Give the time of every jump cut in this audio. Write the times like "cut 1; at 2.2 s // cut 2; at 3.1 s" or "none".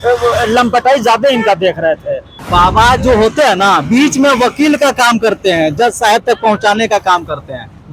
none